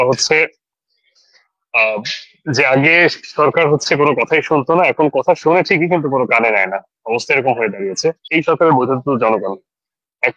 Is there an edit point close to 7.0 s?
no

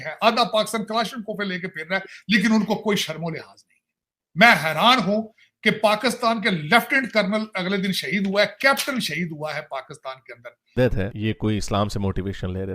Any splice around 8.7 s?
no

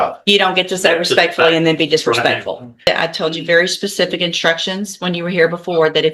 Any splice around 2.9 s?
yes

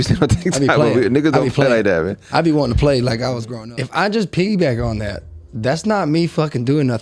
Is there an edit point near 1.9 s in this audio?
no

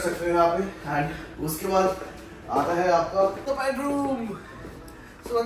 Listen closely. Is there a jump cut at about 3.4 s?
yes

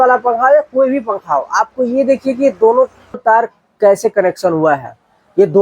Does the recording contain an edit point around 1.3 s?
no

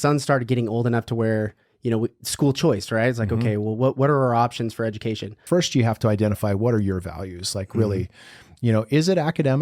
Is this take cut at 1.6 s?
no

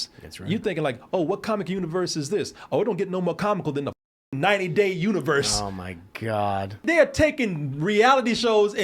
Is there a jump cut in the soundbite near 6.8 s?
yes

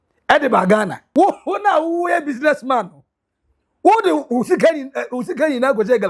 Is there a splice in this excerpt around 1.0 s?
yes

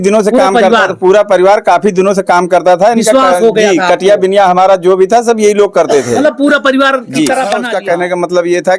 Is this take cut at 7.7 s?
yes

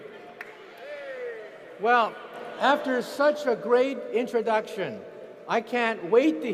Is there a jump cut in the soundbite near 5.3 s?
no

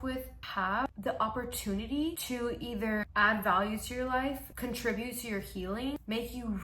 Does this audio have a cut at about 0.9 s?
yes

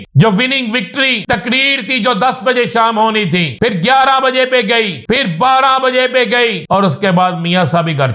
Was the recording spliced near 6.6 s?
yes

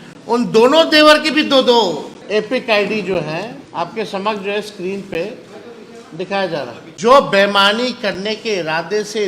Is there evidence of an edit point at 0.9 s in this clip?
no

